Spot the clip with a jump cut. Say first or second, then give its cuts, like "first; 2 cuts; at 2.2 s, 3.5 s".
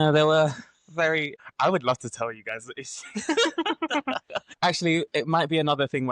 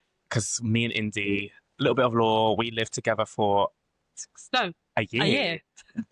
first; 2 cuts; at 1.4 s, 4.4 s